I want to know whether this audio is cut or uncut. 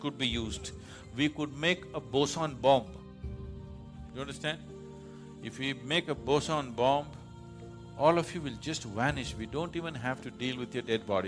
uncut